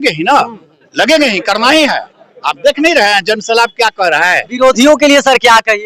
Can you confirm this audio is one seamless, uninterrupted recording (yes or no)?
yes